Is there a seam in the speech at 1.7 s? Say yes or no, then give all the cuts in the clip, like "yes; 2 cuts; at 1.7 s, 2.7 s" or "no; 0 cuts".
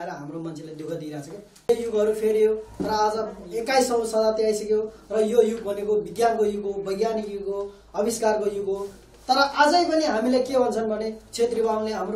yes; 1 cut; at 1.7 s